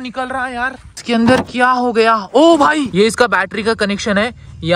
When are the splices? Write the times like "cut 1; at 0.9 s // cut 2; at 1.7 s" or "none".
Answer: cut 1; at 1.0 s // cut 2; at 2.9 s

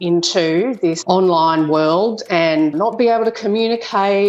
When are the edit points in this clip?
cut 1; at 1.0 s // cut 2; at 2.7 s

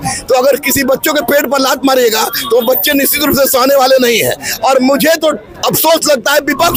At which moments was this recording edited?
none

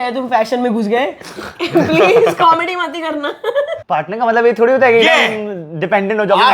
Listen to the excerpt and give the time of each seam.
cut 1; at 3.8 s

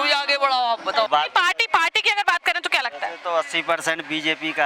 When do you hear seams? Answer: cut 1; at 1.1 s

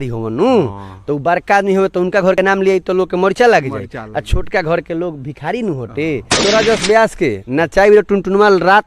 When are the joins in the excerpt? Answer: cut 1; at 6.4 s

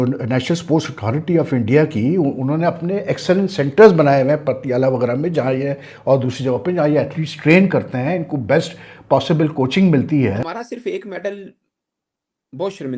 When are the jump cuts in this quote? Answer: cut 1; at 10.4 s

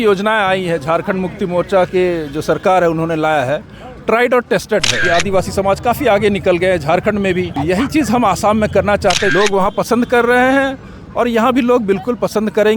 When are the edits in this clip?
cut 1; at 5.0 s // cut 2; at 7.5 s // cut 3; at 9.3 s

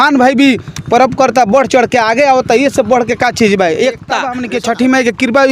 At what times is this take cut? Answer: cut 1; at 4.4 s

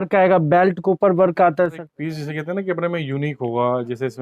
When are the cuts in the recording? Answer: cut 1; at 1.9 s

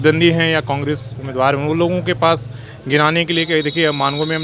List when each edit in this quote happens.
none

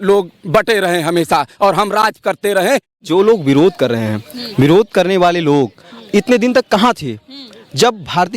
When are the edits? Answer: cut 1; at 2.9 s

